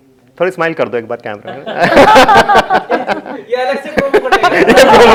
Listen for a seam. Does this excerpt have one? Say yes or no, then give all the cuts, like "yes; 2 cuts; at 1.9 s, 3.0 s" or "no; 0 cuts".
no; 0 cuts